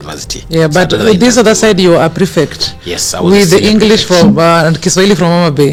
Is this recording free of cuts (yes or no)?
yes